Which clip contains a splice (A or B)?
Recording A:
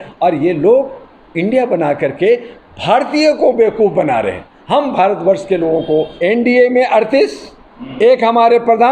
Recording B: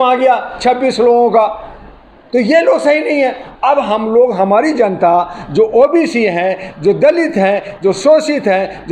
A